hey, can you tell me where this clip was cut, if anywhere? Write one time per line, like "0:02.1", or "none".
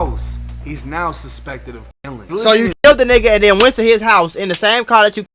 0:02.2